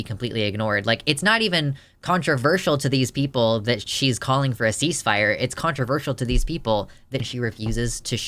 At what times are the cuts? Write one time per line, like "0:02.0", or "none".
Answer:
0:07.2